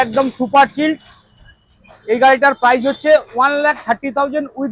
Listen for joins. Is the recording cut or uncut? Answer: uncut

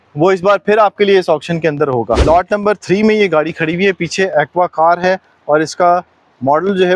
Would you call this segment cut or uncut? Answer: cut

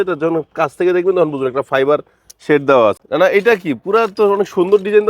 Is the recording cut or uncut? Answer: cut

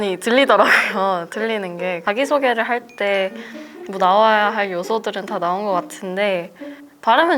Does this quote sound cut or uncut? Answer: uncut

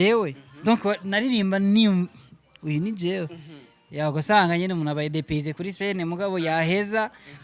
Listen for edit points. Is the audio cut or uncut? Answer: uncut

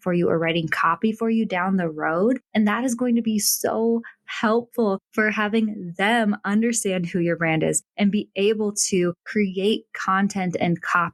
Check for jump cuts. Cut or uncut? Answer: uncut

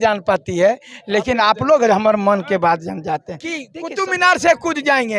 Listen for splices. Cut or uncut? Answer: cut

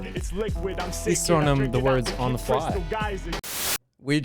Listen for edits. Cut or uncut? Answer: cut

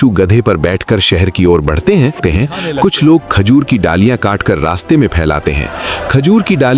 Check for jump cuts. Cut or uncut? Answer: cut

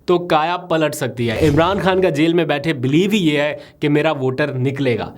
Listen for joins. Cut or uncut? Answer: cut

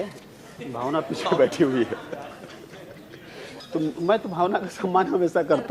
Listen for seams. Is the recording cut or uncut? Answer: cut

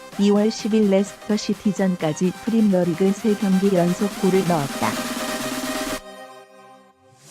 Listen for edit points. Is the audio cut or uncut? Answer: cut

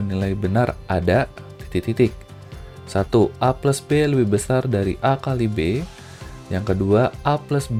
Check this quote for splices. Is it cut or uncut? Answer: uncut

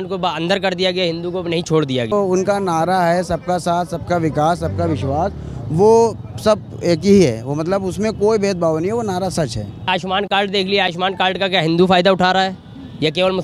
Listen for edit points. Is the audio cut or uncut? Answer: cut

